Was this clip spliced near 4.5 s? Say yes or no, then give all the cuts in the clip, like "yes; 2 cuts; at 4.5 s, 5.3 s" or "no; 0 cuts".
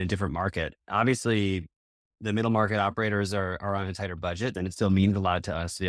yes; 1 cut; at 4.5 s